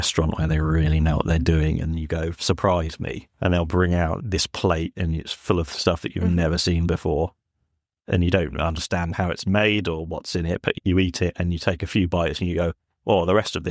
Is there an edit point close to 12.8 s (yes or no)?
no